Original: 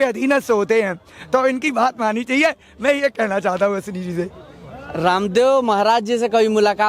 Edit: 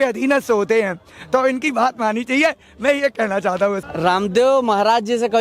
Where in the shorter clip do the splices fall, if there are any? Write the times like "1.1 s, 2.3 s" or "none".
3.9 s